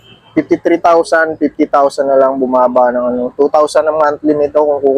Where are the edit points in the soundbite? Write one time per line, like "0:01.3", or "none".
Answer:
none